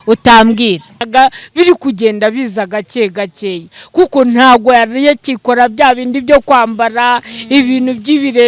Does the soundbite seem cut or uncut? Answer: cut